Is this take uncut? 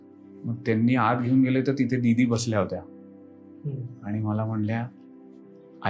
yes; 0 cuts

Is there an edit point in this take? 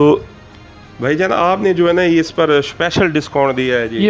no; 0 cuts

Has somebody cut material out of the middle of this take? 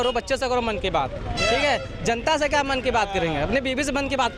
no; 0 cuts

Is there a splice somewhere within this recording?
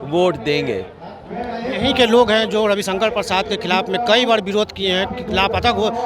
no; 0 cuts

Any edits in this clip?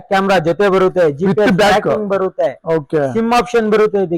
no; 0 cuts

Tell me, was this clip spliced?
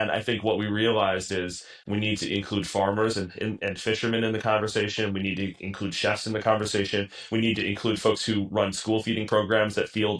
no; 0 cuts

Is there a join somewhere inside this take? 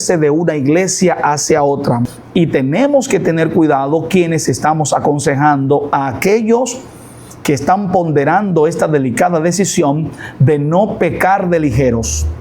yes; 1 cut; at 2.0 s

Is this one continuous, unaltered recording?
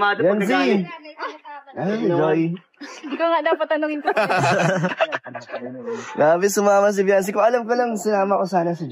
yes; 0 cuts

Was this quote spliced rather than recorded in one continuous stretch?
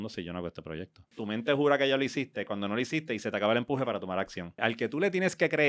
yes; 2 cuts; at 1.1 s, 4.6 s

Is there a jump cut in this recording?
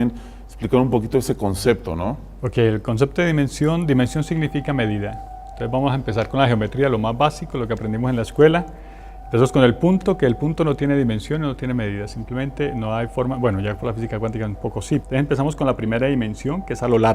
yes; 1 cut; at 4.8 s

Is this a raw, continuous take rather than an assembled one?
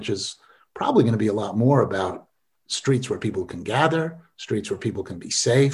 yes; 0 cuts

